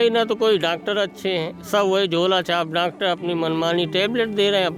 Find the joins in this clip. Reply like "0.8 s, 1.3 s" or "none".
none